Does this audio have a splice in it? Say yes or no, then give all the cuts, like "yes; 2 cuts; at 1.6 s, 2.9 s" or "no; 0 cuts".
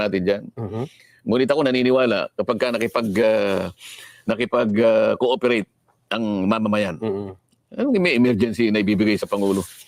no; 0 cuts